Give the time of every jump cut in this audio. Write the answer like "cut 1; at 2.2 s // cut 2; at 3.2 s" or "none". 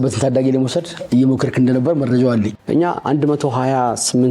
cut 1; at 2.6 s

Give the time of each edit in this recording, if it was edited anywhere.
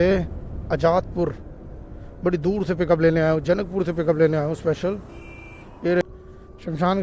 cut 1; at 6.0 s

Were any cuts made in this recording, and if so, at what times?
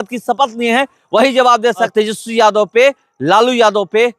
cut 1; at 1.9 s

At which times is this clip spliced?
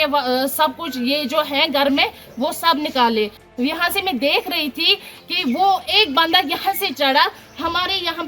cut 1; at 3.4 s

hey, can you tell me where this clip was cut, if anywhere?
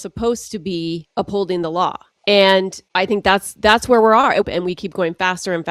cut 1; at 1.1 s // cut 2; at 2.1 s // cut 3; at 2.8 s // cut 4; at 4.4 s

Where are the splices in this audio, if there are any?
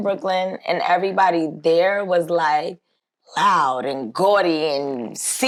none

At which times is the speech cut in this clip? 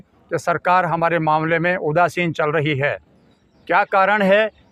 none

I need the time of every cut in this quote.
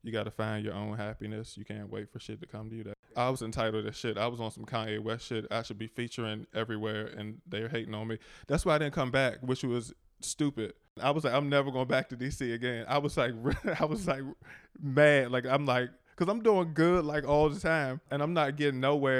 cut 1; at 3.2 s // cut 2; at 10.9 s // cut 3; at 18.2 s

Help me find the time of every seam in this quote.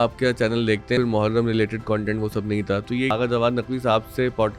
cut 1; at 1.0 s // cut 2; at 3.1 s

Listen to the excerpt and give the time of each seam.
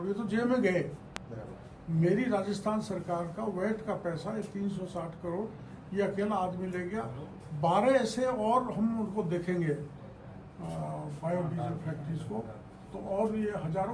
none

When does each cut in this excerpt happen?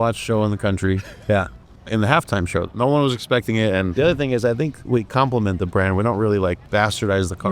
cut 1; at 2.7 s // cut 2; at 3.9 s // cut 3; at 6.6 s

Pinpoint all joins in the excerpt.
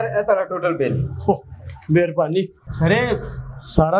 cut 1; at 2.6 s

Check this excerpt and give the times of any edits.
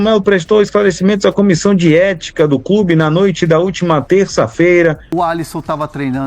cut 1; at 5.0 s

